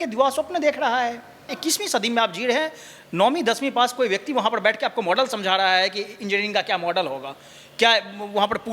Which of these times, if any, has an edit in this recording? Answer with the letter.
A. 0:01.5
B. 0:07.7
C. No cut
A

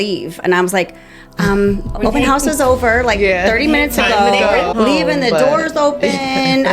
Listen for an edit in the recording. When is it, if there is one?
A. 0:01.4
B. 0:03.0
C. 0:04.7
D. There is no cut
C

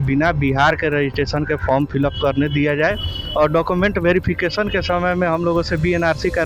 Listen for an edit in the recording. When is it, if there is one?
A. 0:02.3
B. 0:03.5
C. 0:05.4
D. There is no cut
D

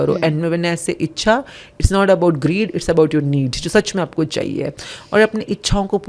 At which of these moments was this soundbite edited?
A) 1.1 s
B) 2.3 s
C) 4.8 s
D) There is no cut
D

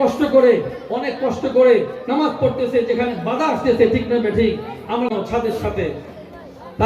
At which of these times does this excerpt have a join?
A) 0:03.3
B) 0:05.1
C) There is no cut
B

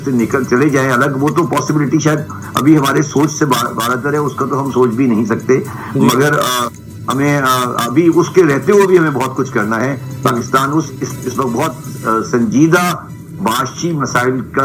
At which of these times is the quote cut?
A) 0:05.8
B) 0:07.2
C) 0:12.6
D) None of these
D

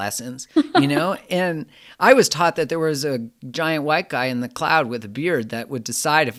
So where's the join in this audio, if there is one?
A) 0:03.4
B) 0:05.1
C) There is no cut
C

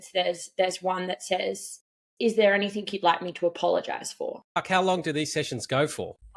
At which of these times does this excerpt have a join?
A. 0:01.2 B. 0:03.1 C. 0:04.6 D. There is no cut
C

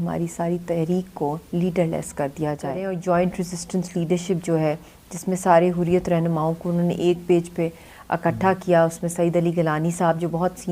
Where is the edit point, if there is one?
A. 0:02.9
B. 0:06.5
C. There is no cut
A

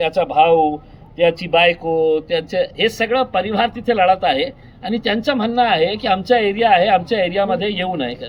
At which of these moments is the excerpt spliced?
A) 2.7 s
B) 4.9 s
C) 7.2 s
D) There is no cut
D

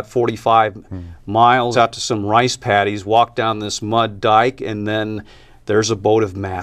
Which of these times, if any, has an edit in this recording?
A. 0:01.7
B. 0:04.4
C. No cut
A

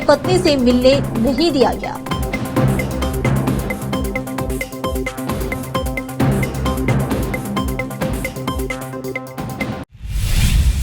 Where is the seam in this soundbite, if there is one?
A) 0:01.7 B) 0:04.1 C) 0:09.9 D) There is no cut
C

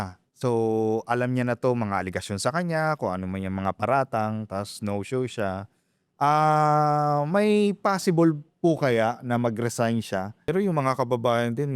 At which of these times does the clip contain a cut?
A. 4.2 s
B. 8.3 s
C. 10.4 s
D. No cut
C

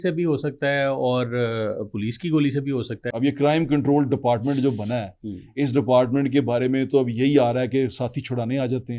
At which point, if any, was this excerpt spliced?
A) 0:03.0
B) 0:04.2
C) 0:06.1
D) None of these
A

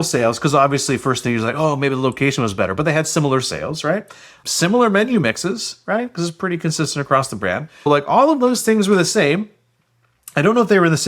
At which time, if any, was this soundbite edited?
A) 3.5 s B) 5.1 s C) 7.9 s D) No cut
C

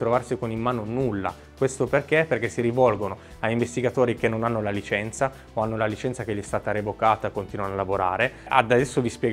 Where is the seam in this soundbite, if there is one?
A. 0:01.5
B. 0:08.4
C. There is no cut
C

